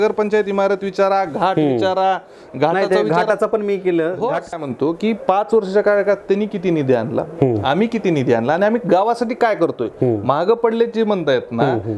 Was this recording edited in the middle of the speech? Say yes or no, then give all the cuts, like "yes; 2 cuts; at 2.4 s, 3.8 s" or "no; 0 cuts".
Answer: yes; 1 cut; at 4.5 s